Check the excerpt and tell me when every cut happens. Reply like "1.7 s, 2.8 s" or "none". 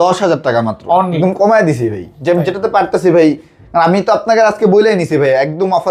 1.2 s

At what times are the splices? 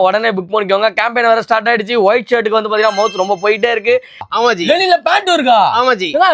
4.3 s

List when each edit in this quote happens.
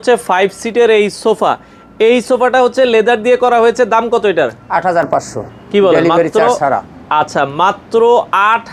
none

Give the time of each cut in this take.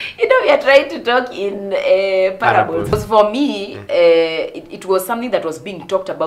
2.9 s

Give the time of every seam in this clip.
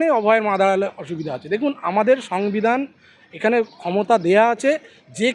none

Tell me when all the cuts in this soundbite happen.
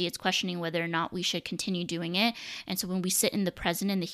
none

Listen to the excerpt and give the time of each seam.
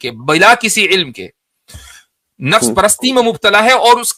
none

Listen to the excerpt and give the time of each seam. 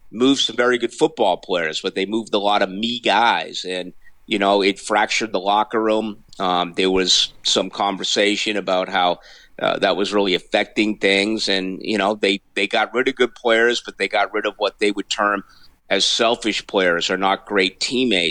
none

